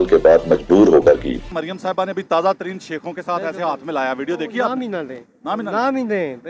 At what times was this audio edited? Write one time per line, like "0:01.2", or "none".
0:01.5